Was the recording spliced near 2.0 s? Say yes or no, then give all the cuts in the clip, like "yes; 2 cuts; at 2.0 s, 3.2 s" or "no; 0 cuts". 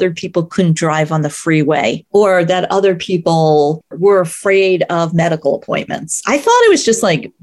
yes; 2 cuts; at 2.0 s, 3.9 s